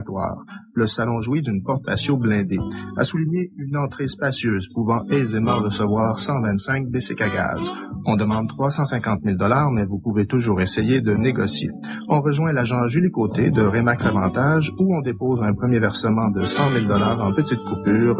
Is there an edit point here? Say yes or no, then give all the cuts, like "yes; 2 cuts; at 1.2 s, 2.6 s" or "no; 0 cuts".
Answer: yes; 1 cut; at 5.6 s